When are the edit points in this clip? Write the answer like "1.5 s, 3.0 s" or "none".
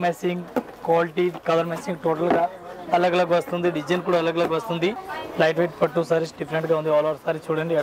5.0 s